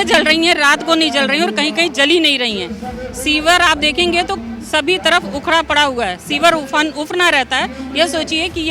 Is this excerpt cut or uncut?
uncut